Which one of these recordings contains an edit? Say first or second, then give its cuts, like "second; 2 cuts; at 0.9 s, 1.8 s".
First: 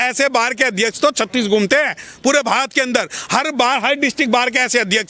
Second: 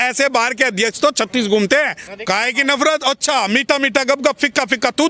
second; 1 cut; at 2.0 s